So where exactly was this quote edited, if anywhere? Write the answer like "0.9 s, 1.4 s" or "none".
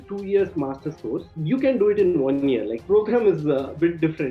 1.2 s, 2.8 s